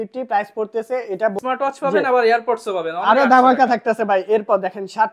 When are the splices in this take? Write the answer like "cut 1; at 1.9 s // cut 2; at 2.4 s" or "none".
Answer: cut 1; at 1.4 s